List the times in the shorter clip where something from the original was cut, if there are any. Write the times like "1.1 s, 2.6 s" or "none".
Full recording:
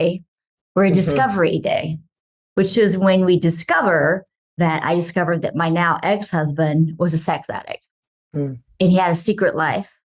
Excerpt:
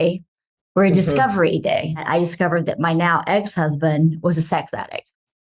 2.0 s